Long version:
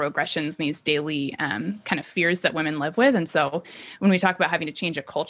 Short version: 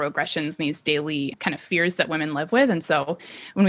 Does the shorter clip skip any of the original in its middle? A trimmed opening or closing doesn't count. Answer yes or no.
yes